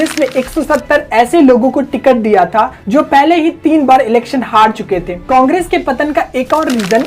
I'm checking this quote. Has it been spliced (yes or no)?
yes